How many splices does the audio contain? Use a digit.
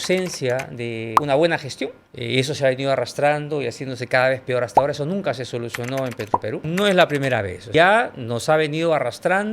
3